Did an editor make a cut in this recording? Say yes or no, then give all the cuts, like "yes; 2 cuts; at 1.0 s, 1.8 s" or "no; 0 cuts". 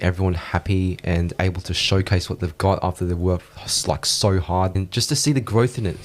yes; 1 cut; at 4.8 s